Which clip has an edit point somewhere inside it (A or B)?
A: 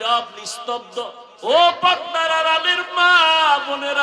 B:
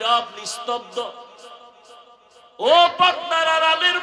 A